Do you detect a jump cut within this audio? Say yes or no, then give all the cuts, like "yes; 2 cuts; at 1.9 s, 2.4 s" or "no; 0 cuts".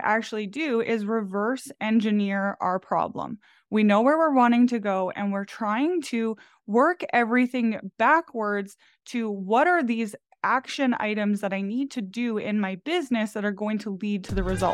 no; 0 cuts